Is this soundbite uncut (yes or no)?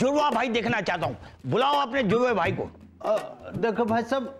yes